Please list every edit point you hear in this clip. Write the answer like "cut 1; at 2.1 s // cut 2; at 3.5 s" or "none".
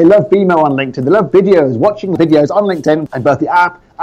cut 1; at 2.1 s // cut 2; at 3.1 s